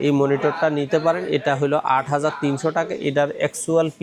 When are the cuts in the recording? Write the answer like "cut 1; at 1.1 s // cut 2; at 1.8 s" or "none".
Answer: none